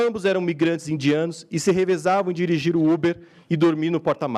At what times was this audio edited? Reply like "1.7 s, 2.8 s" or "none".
none